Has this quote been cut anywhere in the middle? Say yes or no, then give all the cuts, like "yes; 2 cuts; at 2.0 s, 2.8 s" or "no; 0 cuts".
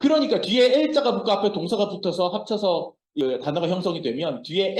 yes; 1 cut; at 3.2 s